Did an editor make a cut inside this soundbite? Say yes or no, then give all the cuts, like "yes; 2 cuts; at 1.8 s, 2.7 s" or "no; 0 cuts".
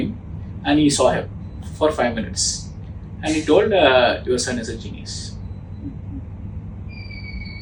no; 0 cuts